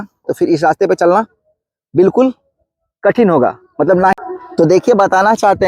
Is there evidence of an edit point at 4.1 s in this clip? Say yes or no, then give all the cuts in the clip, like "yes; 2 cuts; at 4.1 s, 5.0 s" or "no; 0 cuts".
yes; 1 cut; at 4.1 s